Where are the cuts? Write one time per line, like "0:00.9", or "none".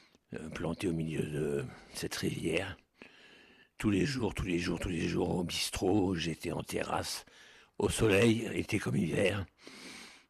0:04.1